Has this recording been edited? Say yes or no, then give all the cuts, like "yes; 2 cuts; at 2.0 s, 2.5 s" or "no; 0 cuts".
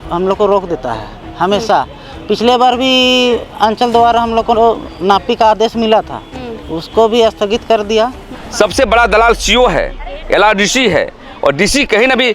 yes; 1 cut; at 8.3 s